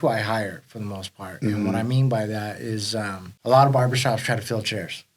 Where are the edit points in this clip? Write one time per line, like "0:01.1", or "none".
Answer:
0:03.2

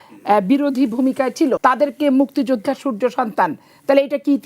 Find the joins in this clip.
0:01.6

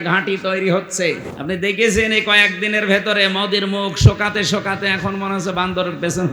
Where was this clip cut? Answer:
0:01.3

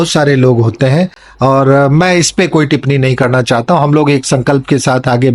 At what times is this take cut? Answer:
none

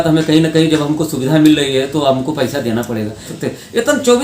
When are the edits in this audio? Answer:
0:03.3

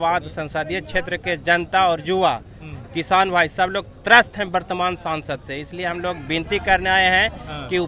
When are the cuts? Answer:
none

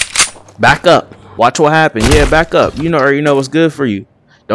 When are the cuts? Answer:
0:01.2

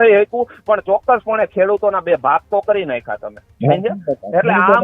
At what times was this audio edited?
none

